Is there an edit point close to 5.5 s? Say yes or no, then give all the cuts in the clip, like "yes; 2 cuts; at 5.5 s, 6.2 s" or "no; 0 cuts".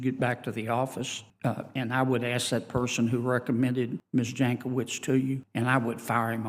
yes; 3 cuts; at 1.2 s, 4.0 s, 5.5 s